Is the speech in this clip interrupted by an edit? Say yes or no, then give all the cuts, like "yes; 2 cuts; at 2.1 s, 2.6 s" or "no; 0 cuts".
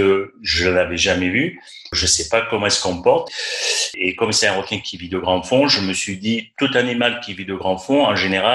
yes; 1 cut; at 3.4 s